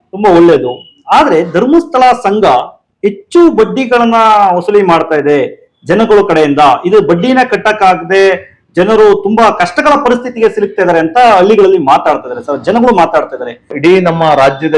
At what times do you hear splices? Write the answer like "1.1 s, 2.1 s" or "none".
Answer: 13.7 s